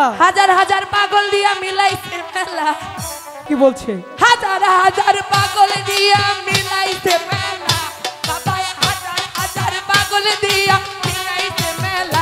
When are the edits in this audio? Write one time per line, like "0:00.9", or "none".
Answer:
0:03.4